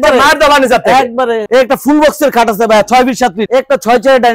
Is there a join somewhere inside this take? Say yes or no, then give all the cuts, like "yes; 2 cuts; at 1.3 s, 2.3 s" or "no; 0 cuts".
yes; 2 cuts; at 1.4 s, 3.4 s